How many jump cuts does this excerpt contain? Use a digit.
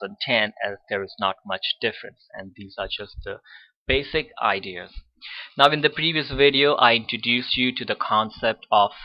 0